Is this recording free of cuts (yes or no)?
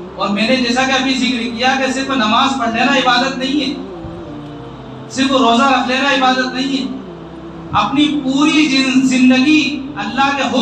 no